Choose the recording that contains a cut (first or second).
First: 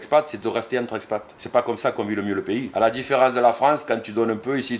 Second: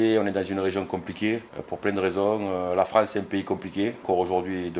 first